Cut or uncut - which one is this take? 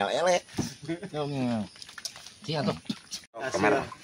cut